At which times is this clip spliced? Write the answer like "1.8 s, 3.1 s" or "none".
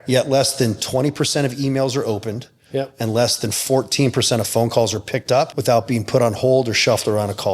5.5 s